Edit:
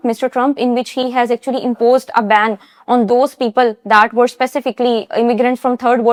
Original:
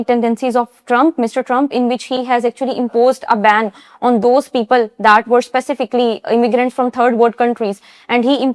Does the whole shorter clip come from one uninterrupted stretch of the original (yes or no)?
yes